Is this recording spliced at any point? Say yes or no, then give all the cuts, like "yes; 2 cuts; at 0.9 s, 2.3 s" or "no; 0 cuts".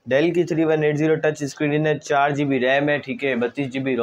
no; 0 cuts